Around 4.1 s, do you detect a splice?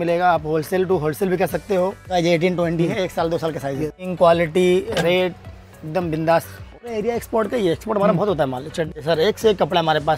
yes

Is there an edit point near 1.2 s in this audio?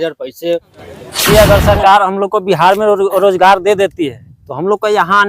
yes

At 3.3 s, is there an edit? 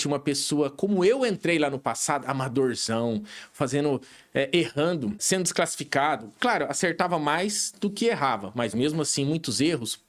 no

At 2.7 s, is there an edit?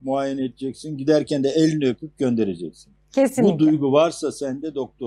no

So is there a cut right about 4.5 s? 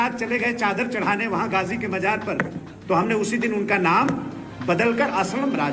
no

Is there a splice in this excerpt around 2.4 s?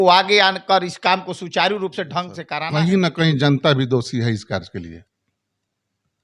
yes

